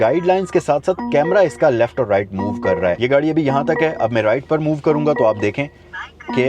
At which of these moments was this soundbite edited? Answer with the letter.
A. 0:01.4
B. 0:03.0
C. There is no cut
B